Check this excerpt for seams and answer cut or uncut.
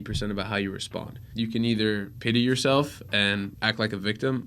cut